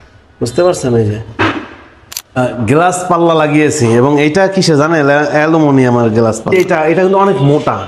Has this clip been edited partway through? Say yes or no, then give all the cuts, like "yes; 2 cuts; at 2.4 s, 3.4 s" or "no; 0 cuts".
yes; 2 cuts; at 2.4 s, 6.5 s